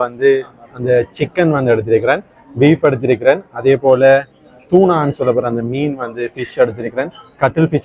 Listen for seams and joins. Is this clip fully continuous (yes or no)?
yes